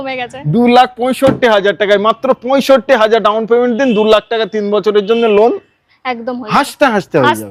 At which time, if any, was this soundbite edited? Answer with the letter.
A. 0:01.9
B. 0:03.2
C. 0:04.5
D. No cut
D